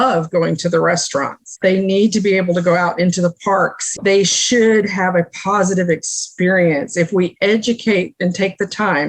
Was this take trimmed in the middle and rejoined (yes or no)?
yes